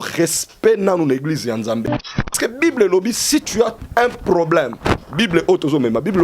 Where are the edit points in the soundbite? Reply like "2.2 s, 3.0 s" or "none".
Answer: 2.3 s